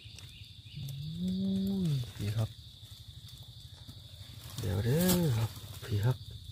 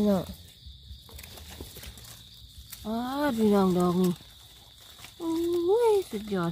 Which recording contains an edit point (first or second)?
second